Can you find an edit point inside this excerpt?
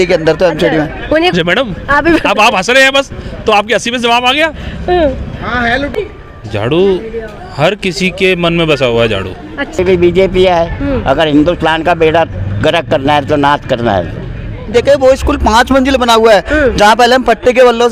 yes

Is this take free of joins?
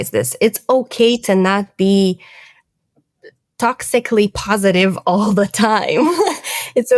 yes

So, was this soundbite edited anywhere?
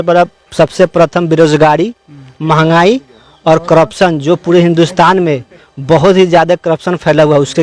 no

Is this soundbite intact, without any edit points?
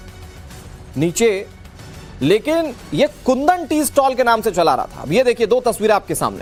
yes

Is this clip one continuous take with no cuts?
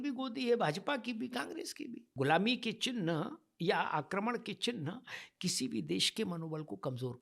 no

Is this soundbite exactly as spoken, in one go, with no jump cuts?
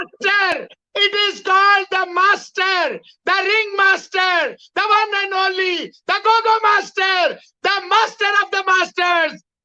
yes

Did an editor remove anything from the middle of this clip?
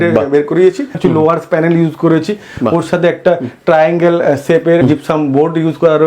yes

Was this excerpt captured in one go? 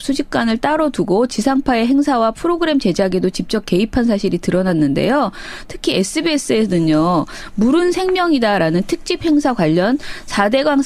yes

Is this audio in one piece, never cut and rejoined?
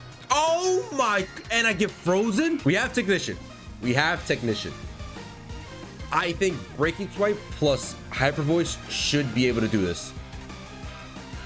no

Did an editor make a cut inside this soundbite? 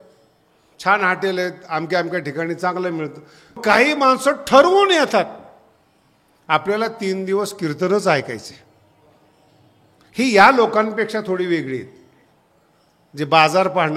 yes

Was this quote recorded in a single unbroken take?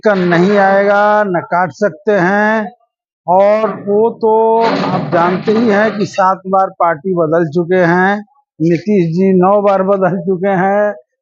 yes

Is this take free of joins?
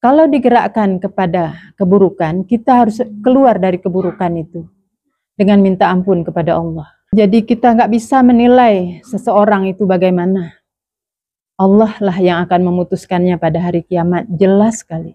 no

